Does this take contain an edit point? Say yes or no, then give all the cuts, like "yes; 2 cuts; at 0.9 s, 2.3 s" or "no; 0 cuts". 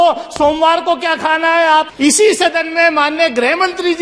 yes; 1 cut; at 1.9 s